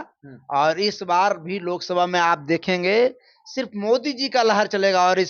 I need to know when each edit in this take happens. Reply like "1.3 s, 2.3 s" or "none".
none